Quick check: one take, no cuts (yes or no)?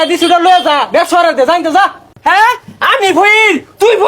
no